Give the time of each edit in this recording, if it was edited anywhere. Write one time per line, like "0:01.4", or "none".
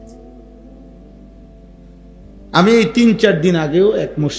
0:02.5